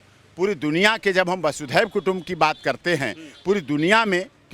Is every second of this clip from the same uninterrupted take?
yes; 0 cuts

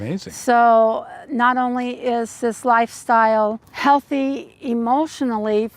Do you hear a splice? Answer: yes; 1 cut; at 3.7 s

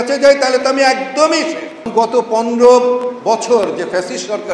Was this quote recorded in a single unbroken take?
no; 1 cut; at 1.9 s

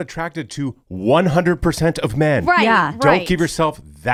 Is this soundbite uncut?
yes; 0 cuts

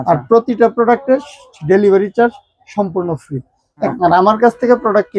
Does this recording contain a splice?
yes; 1 cut; at 3.9 s

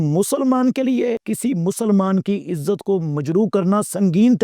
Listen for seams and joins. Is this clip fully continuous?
no; 1 cut; at 1.3 s

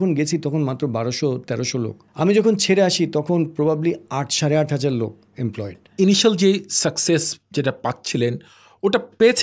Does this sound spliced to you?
yes; 2 cuts; at 2.0 s, 5.9 s

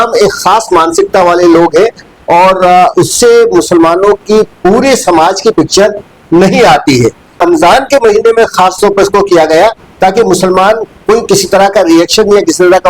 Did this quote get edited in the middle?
yes; 1 cut; at 7.4 s

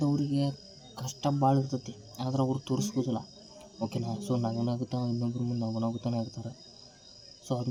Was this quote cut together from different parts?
no; 0 cuts

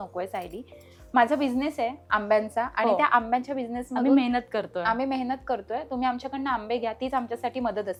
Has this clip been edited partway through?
no; 0 cuts

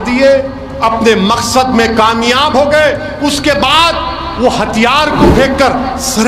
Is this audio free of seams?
yes; 0 cuts

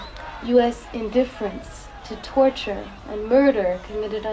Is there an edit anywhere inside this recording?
no; 0 cuts

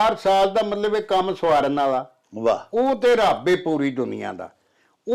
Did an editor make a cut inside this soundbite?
no; 0 cuts

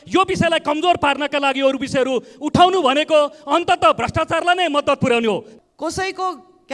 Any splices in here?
yes; 1 cut; at 5.5 s

